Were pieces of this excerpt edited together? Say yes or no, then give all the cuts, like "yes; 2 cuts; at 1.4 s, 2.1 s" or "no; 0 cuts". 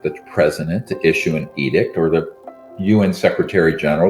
no; 0 cuts